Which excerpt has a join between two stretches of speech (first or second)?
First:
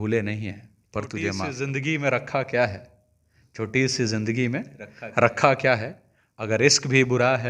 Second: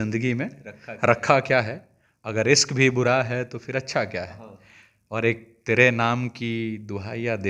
first